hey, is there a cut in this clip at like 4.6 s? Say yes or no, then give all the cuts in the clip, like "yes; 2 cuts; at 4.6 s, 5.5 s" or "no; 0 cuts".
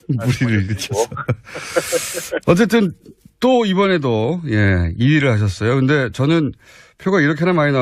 no; 0 cuts